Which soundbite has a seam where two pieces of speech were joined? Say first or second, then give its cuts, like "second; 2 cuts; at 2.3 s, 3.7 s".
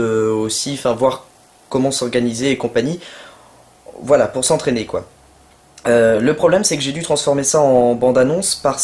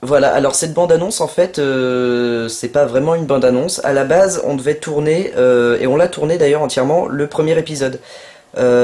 second; 1 cut; at 3.8 s